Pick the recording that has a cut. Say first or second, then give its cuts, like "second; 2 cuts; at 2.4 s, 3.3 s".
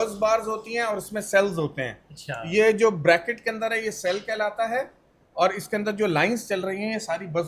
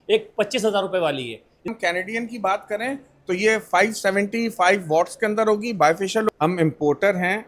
second; 2 cuts; at 1.7 s, 6.3 s